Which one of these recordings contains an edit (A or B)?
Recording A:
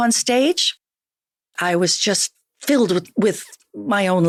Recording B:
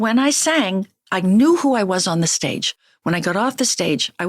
B